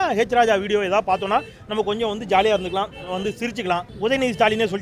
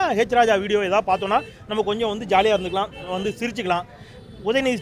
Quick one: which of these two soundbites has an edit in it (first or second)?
first